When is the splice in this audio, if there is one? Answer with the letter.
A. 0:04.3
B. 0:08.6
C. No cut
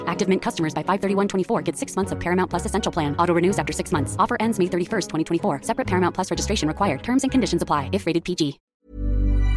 B